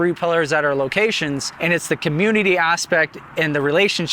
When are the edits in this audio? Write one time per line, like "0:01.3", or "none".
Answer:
0:01.5